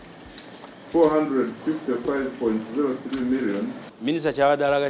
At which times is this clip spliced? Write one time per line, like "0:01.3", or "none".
0:03.9